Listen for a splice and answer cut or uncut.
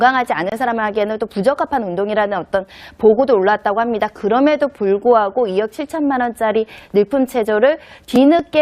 cut